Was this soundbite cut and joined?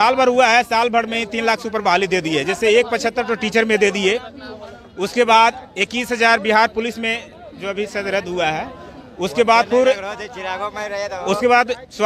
no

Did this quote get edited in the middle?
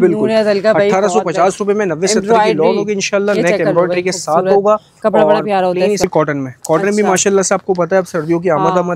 yes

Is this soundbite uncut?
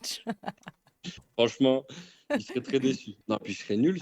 no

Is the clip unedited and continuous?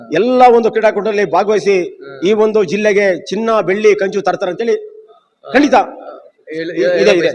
yes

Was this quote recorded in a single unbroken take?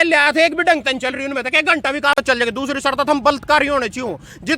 no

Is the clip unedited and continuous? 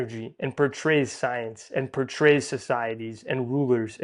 yes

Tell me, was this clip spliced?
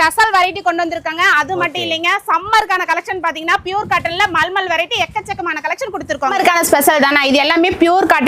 yes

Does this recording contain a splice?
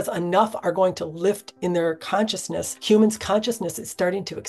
yes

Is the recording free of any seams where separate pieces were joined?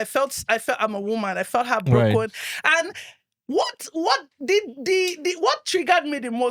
yes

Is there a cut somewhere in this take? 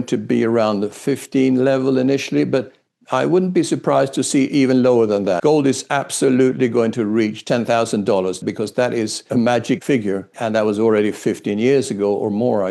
yes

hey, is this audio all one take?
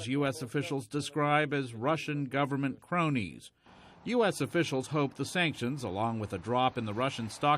no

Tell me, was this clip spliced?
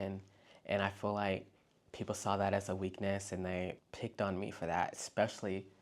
yes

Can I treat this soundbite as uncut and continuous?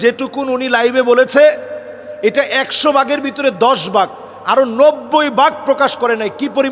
yes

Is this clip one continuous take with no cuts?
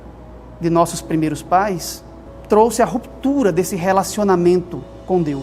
yes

